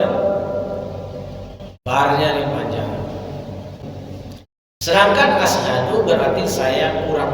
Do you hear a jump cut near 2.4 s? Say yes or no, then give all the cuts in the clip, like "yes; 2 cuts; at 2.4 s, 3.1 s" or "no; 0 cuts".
no; 1 cut; at 3.8 s